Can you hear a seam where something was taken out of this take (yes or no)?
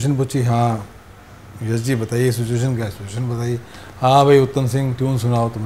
no